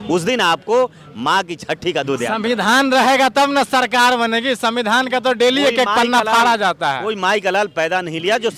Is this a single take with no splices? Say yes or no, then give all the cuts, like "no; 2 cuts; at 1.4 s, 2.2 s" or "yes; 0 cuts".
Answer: yes; 0 cuts